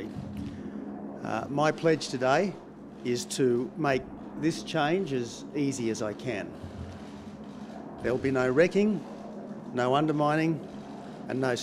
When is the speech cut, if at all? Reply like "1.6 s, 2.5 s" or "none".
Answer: 2.5 s